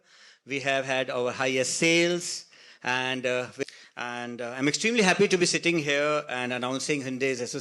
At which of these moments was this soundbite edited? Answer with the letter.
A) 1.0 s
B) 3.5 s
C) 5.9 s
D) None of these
B